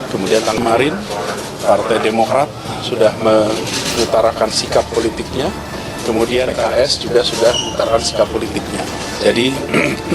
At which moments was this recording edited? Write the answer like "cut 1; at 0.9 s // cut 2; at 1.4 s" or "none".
none